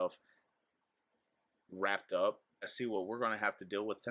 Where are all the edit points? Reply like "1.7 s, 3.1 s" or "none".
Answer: 2.7 s